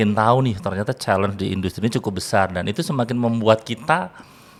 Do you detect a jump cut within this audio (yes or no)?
no